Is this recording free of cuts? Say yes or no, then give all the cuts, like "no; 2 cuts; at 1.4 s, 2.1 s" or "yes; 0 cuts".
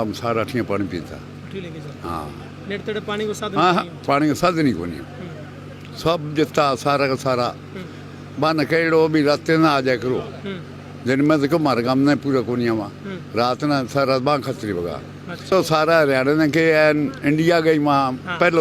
no; 1 cut; at 15.5 s